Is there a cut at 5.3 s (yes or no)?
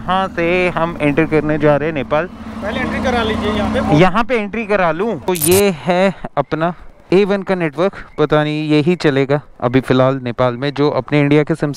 yes